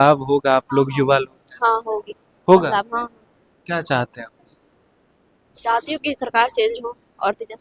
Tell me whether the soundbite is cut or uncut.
uncut